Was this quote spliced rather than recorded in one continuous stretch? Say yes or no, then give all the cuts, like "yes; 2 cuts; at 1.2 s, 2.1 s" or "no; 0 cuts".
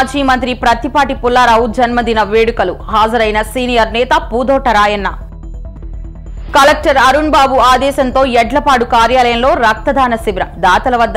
no; 0 cuts